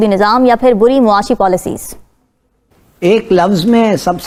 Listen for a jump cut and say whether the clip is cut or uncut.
uncut